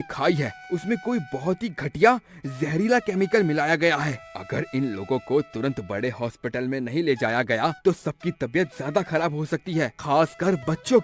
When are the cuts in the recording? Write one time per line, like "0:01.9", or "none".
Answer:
none